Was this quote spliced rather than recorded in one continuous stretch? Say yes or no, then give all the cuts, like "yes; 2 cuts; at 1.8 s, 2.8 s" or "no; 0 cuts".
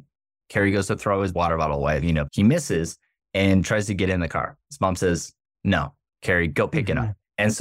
yes; 2 cuts; at 2.3 s, 6.5 s